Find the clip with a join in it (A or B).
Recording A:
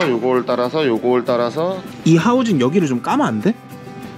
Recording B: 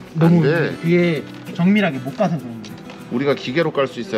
A